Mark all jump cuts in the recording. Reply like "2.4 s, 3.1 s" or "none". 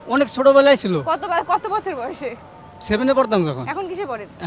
none